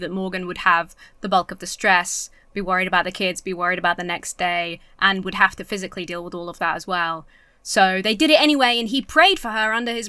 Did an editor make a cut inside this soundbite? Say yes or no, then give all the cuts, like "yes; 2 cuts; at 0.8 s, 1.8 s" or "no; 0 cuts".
no; 0 cuts